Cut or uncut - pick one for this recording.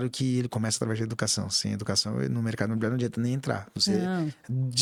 uncut